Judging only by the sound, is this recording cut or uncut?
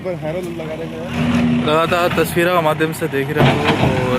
cut